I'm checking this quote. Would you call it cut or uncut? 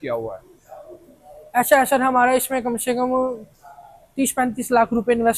uncut